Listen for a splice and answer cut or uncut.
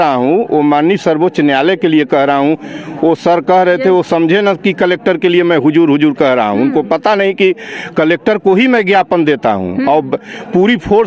uncut